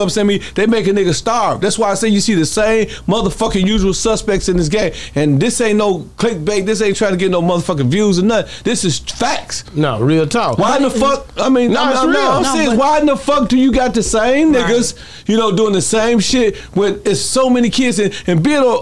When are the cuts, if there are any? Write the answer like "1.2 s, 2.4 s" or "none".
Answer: none